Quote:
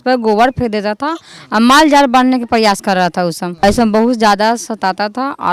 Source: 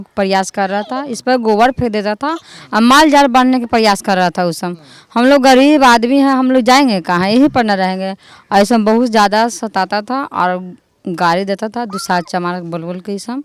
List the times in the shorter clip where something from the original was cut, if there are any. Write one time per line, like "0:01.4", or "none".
0:03.5